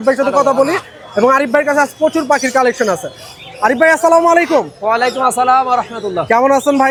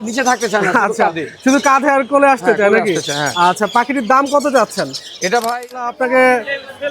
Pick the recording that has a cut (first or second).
second